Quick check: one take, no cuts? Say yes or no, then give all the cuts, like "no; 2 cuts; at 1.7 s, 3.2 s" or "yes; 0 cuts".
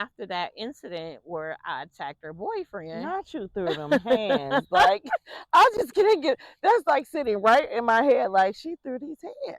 yes; 0 cuts